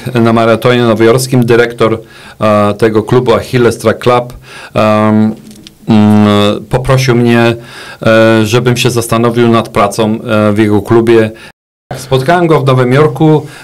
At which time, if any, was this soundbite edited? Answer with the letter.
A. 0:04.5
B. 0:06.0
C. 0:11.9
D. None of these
C